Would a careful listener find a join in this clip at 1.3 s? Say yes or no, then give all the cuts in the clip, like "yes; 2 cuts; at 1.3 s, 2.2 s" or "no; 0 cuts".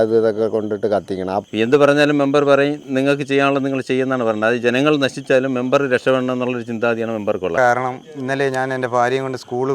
yes; 2 cuts; at 1.3 s, 7.6 s